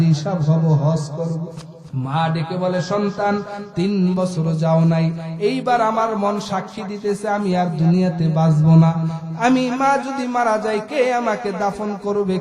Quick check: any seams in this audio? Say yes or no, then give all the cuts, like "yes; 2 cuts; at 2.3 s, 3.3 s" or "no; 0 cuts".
yes; 1 cut; at 1.6 s